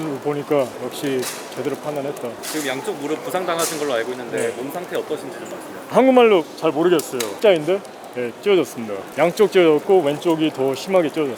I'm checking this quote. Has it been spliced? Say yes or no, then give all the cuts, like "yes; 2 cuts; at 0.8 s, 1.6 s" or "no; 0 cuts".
no; 0 cuts